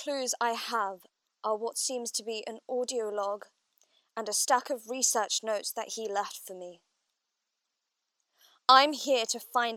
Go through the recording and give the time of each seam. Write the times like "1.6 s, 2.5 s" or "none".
1.0 s